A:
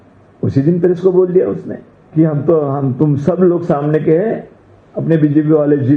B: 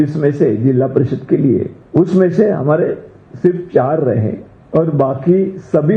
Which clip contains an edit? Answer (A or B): B